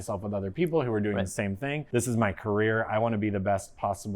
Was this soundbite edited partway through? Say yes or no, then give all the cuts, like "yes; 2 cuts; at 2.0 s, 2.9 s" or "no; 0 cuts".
yes; 1 cut; at 1.7 s